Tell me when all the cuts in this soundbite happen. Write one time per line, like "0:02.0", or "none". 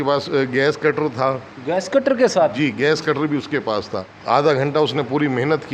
none